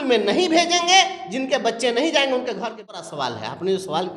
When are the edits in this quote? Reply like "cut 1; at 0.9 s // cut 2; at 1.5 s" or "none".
cut 1; at 3.1 s